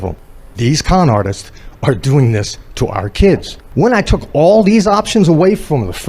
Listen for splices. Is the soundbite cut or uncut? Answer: cut